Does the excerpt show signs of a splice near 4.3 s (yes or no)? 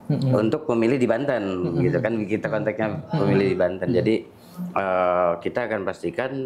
no